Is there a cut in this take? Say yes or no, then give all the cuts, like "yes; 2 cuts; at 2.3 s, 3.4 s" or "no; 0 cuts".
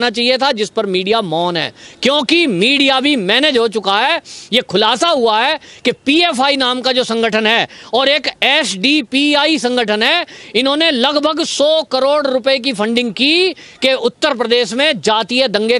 no; 0 cuts